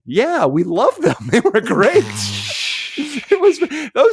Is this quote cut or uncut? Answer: uncut